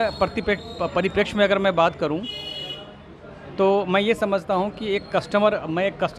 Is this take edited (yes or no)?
no